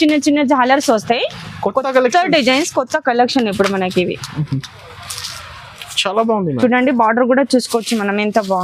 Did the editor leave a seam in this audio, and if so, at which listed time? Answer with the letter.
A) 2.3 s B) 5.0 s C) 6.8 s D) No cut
D